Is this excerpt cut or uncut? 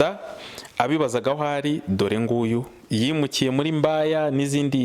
uncut